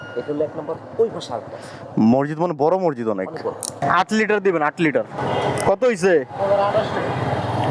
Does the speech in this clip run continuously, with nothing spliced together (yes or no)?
no